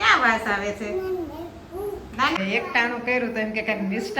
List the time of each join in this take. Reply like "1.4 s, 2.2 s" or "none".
2.4 s